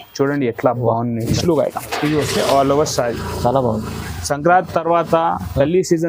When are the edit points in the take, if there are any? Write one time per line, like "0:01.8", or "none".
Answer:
0:01.4

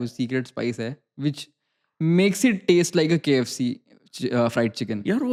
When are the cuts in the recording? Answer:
none

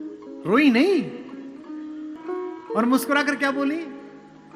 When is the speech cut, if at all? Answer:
0:02.2

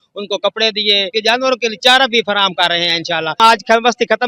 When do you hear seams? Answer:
0:01.1
0:03.4

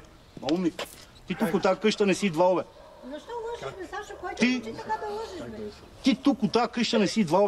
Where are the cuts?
none

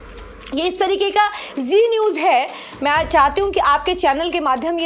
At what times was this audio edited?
none

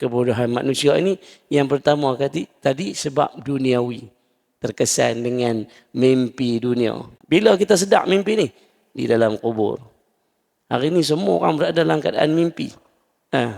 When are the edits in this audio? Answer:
0:07.1

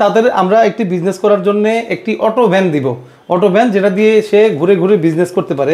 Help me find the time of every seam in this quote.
none

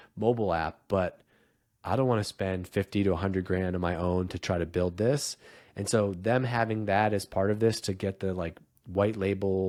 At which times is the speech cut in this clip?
none

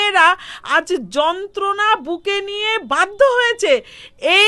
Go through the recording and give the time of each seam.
none

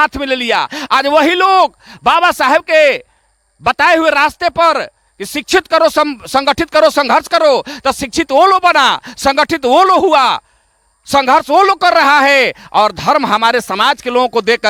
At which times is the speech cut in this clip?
none

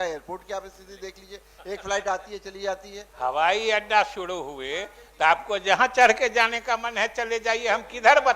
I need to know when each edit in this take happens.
0:03.0

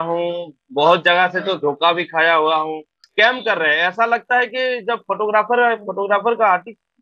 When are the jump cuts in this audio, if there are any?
0:03.0

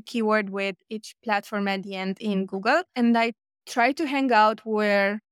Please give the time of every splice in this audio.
0:02.9

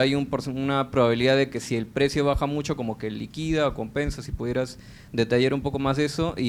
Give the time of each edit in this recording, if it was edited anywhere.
none

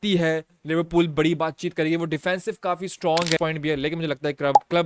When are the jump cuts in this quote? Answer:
0:03.4

